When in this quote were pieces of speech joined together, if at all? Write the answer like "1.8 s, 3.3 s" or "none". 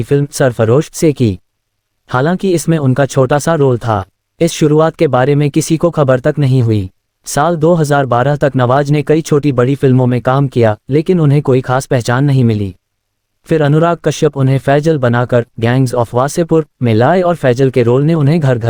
none